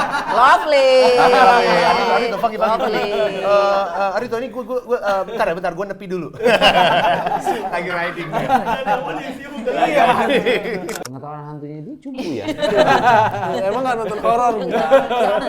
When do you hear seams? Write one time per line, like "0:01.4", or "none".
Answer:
0:10.9